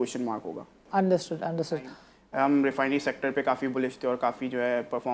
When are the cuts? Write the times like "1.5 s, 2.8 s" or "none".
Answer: 1.8 s